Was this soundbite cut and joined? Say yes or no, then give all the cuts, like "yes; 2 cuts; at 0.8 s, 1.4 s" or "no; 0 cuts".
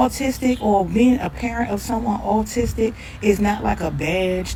no; 0 cuts